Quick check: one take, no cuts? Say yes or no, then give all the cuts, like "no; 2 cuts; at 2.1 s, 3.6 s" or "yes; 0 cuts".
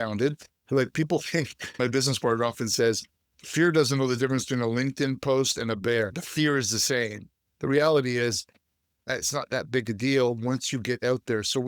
no; 1 cut; at 1.8 s